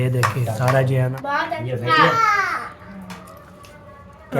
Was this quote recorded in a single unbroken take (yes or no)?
no